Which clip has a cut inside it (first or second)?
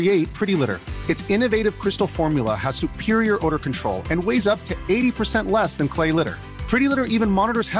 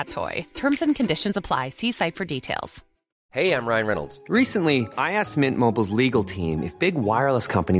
second